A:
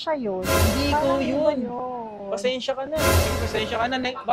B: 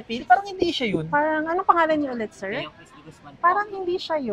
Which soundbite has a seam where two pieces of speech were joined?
A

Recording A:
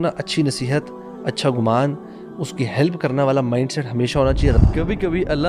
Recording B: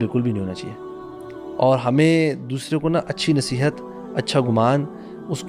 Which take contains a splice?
A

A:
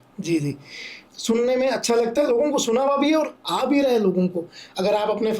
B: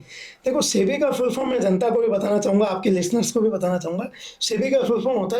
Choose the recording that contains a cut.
A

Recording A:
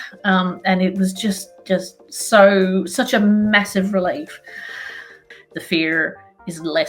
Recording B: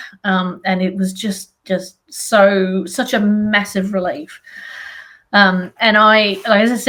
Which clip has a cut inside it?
A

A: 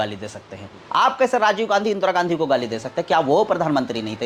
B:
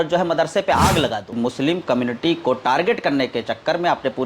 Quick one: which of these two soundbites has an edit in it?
B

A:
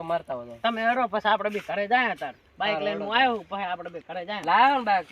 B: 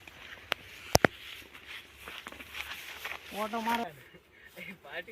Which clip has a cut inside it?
B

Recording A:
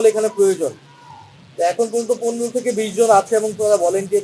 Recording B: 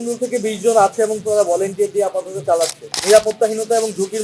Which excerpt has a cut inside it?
B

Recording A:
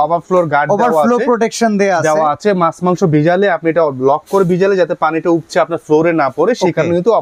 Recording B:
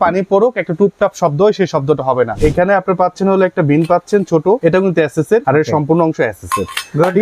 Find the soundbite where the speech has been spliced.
B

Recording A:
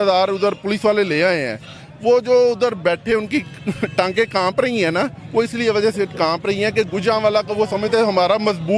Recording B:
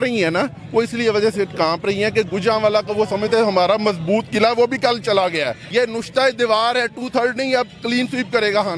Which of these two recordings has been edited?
B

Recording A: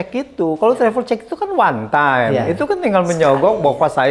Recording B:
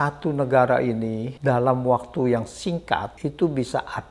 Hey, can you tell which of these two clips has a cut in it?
B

